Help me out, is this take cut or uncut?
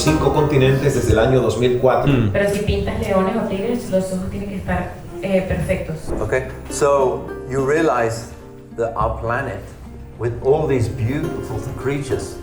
cut